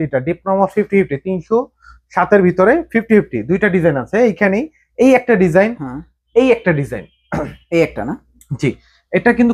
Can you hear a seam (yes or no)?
no